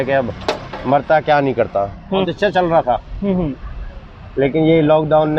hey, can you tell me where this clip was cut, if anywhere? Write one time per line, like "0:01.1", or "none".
0:02.2